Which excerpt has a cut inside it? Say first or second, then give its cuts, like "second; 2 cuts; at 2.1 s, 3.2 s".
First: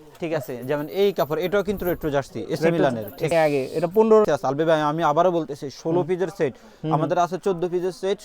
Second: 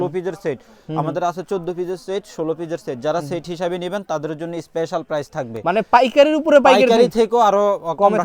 first; 2 cuts; at 3.3 s, 4.3 s